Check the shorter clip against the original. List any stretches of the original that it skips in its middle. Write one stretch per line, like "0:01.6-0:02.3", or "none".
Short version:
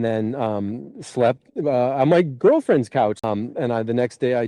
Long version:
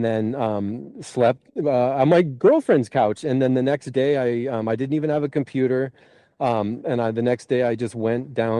0:03.2-0:06.5